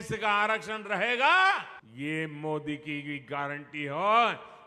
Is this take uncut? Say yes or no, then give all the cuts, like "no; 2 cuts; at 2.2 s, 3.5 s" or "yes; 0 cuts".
no; 1 cut; at 1.8 s